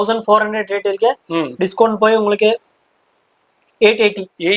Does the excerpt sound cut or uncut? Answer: uncut